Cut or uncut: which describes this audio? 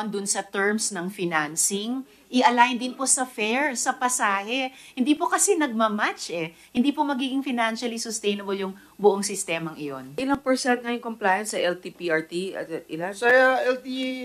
cut